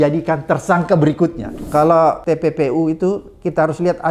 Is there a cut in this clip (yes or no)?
yes